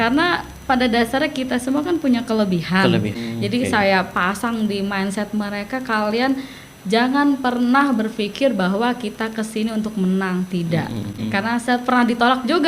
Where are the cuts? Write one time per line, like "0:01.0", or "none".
0:03.2
0:11.2